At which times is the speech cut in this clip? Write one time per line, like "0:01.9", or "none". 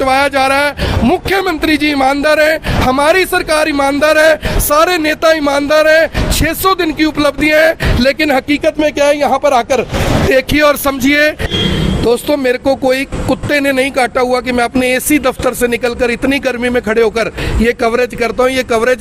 0:11.5